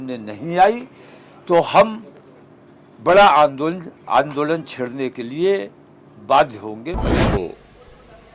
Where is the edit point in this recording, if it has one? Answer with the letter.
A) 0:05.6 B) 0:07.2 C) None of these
B